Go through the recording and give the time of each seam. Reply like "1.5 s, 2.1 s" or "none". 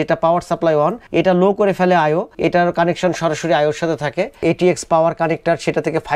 4.4 s